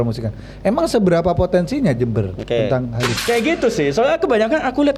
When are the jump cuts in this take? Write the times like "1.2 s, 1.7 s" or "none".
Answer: 3.1 s